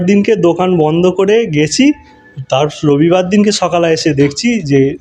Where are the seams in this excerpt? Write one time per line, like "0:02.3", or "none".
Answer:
none